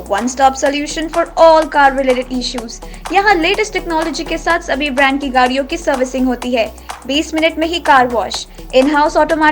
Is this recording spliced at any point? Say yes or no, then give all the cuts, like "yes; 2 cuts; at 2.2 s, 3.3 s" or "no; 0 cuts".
no; 0 cuts